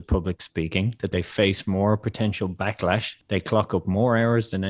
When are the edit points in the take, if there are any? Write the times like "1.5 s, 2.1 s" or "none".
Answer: 1.1 s, 3.1 s

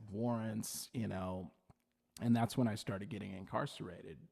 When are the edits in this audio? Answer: none

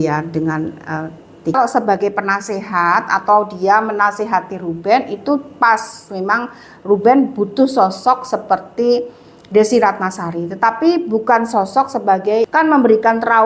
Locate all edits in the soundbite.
1.6 s, 12.5 s

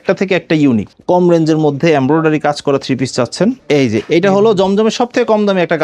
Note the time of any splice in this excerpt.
0.9 s, 3.6 s

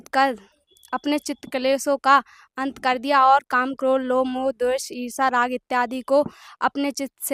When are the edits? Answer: none

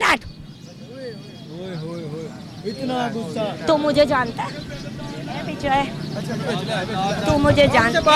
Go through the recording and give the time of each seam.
none

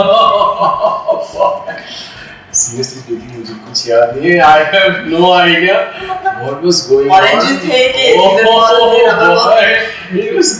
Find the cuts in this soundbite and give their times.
none

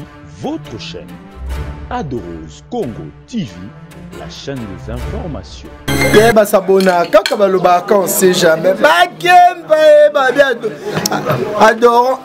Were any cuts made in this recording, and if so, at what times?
5.5 s

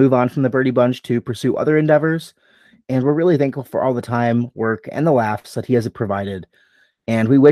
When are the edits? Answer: none

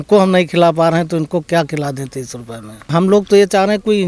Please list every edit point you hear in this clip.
2.9 s

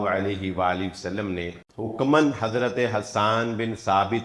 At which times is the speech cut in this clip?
1.6 s

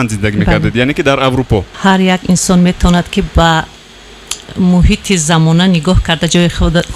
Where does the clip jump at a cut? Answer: 1.7 s

